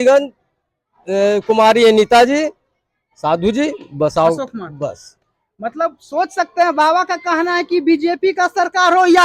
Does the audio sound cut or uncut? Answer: uncut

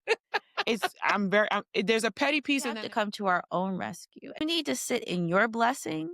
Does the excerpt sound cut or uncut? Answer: cut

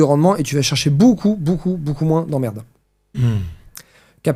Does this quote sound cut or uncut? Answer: uncut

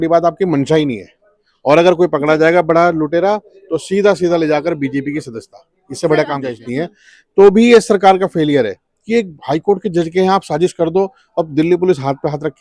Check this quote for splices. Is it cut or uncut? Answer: cut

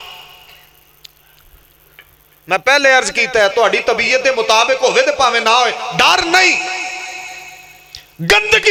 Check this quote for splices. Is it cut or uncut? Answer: uncut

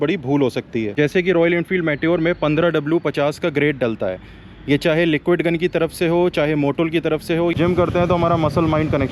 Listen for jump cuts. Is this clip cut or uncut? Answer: cut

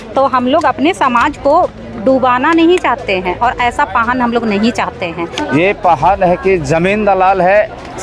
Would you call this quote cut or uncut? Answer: cut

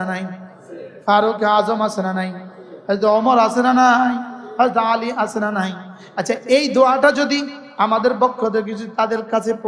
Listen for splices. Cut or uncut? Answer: uncut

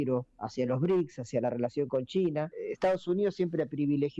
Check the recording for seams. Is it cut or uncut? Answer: cut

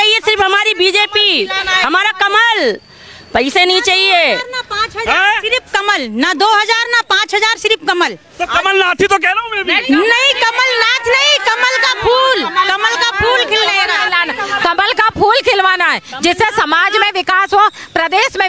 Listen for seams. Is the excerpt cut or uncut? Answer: uncut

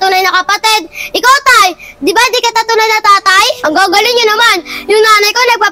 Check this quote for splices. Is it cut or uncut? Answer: cut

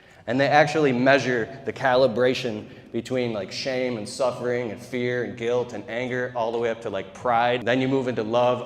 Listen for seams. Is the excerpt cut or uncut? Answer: cut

